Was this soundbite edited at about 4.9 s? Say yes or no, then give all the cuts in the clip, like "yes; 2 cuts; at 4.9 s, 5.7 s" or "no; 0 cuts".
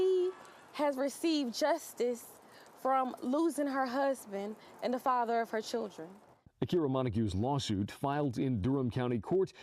yes; 1 cut; at 4.9 s